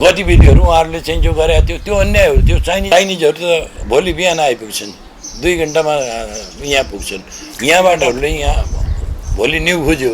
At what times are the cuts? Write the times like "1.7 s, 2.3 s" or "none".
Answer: 2.9 s, 8.1 s